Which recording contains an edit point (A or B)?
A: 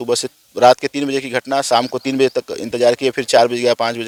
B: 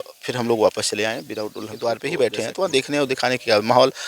B